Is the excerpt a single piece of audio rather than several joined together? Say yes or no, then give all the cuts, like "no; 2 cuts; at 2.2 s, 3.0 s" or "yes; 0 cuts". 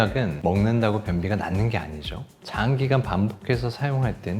no; 1 cut; at 2.3 s